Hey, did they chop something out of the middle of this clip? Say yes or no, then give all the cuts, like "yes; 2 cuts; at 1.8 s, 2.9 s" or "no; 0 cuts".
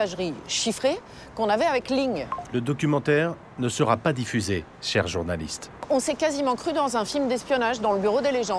yes; 3 cuts; at 2.3 s, 4.8 s, 5.9 s